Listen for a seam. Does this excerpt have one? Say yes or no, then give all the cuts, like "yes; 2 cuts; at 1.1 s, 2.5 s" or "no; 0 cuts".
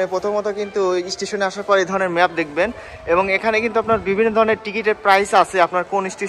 no; 0 cuts